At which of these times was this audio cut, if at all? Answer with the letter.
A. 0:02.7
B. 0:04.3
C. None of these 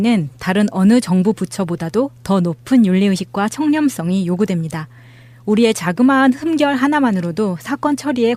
C